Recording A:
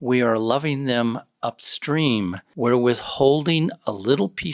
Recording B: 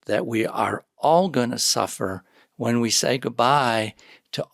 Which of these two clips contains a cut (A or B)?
A